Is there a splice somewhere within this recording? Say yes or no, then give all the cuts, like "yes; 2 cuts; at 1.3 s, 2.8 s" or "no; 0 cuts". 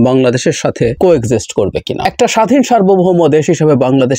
yes; 2 cuts; at 0.9 s, 2.0 s